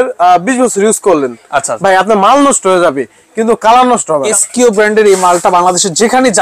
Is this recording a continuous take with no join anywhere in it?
no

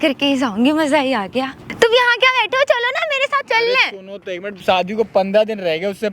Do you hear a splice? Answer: yes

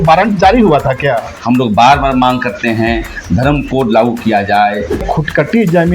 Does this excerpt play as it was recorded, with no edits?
no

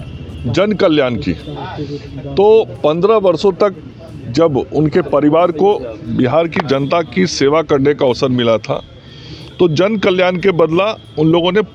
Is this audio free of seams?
yes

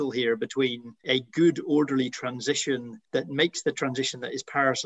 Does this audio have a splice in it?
yes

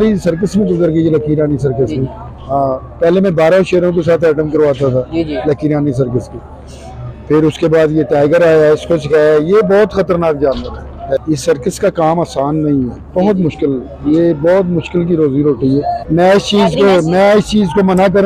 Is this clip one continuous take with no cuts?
no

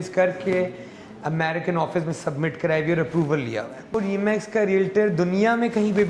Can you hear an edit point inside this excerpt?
yes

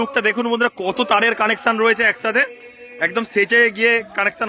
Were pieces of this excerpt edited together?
no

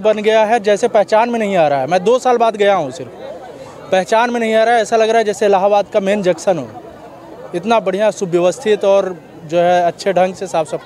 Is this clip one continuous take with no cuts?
yes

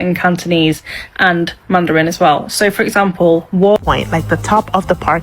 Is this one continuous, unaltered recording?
no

